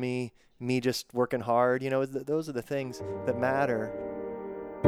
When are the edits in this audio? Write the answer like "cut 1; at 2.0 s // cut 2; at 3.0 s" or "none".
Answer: cut 1; at 3.9 s